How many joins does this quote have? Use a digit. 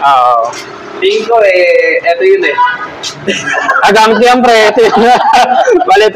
1